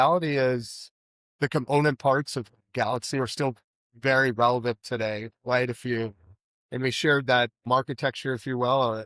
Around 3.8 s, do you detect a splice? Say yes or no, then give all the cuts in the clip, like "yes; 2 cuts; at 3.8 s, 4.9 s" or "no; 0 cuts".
no; 1 cut; at 7.6 s